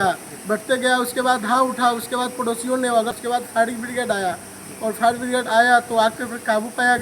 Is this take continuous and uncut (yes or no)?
no